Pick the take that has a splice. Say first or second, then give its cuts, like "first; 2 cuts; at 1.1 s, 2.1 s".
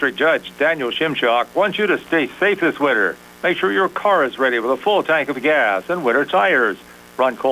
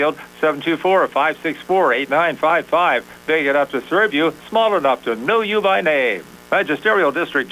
second; 1 cut; at 6.3 s